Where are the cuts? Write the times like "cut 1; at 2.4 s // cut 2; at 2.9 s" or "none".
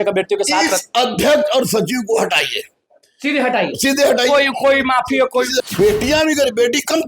cut 1; at 5.6 s

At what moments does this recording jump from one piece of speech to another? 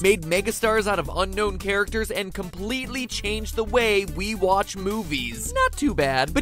cut 1; at 3.6 s

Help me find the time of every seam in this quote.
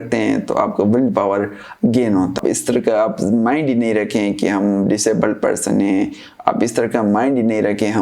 cut 1; at 2.4 s

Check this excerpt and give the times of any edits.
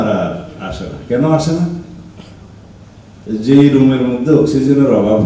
none

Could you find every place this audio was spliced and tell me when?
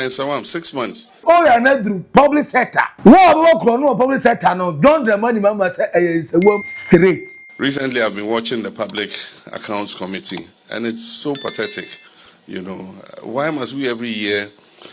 cut 1; at 1.2 s // cut 2; at 2.9 s // cut 3; at 6.7 s

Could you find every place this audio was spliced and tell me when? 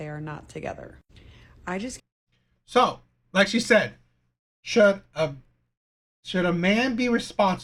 none

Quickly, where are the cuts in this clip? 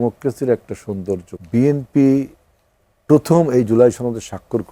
cut 1; at 1.3 s

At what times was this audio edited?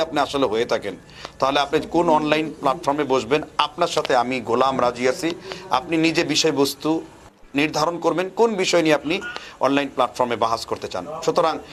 none

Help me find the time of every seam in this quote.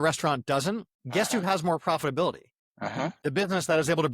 cut 1; at 0.9 s // cut 2; at 3.1 s

